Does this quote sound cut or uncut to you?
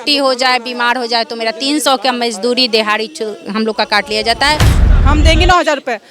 cut